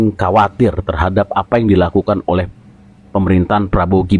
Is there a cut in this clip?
no; 0 cuts

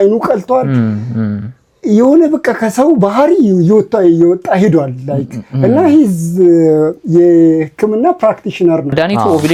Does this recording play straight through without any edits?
yes; 0 cuts

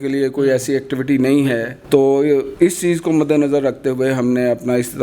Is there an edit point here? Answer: yes; 2 cuts; at 1.7 s, 2.5 s

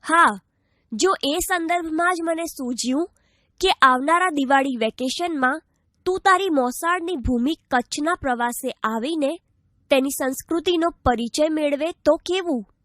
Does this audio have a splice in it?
yes; 1 cut; at 9.5 s

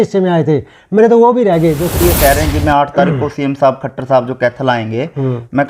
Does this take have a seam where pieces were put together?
yes; 1 cut; at 2.0 s

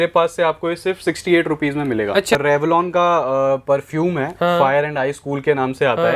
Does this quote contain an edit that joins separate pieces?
yes; 1 cut; at 2.3 s

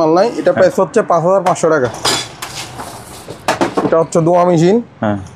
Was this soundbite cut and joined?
yes; 1 cut; at 2.0 s

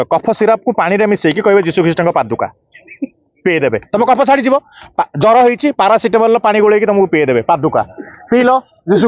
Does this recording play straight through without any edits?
yes; 0 cuts

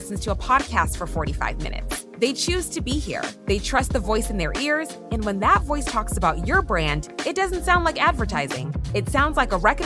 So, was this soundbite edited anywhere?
no; 0 cuts

